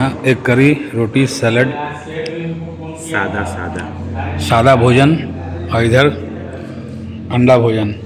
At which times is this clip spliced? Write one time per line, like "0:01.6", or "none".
none